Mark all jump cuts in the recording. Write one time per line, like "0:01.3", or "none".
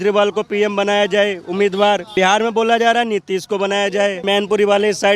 0:02.1
0:04.2